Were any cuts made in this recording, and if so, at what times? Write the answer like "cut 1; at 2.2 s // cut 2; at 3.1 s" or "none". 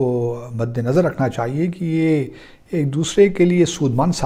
none